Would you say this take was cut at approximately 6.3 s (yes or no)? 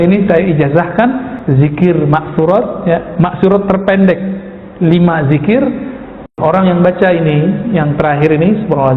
yes